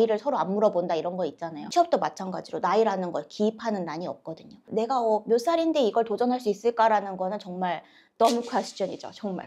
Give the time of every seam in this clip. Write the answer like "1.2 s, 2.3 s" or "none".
1.7 s